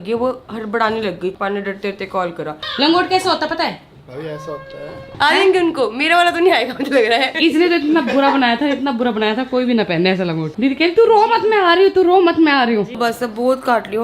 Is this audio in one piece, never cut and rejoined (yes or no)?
no